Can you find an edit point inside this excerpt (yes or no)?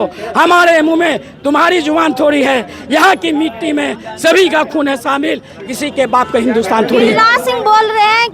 no